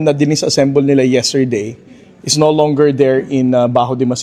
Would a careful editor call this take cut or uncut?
uncut